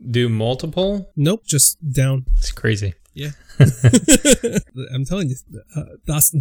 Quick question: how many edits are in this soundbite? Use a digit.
1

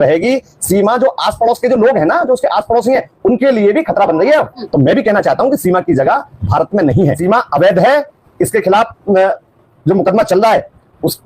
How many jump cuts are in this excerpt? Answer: 2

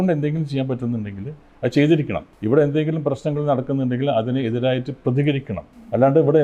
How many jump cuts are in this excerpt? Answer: 1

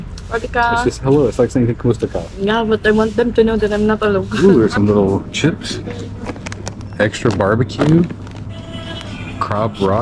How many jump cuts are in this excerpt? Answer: 1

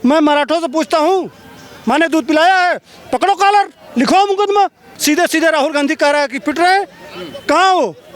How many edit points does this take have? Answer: 1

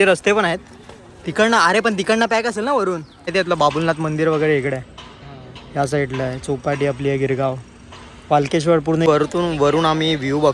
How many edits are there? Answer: 2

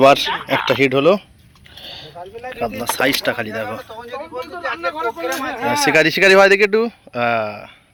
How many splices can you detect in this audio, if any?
0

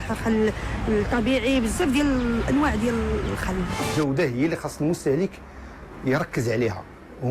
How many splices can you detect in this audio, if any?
1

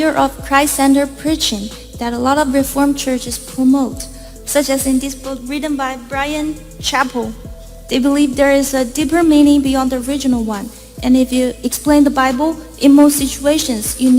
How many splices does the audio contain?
2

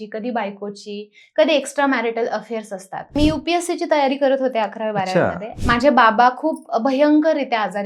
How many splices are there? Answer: 2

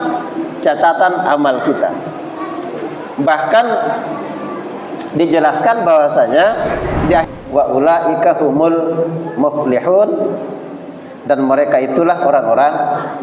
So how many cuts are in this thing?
1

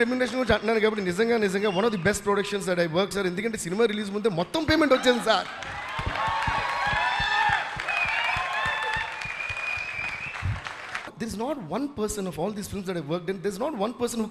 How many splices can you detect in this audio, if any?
1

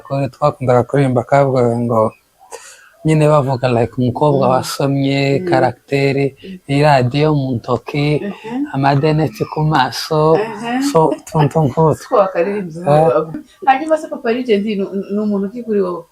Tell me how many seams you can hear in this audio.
1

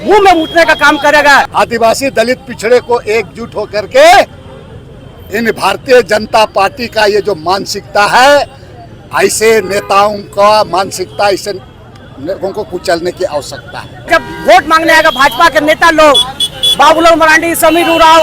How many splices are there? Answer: 2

